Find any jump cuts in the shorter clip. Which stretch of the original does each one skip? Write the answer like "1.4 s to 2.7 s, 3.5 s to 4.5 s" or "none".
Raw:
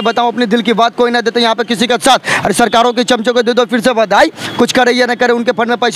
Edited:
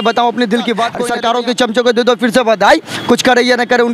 1.0 s to 2.5 s